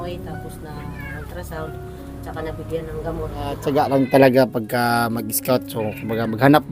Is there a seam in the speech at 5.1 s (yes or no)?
no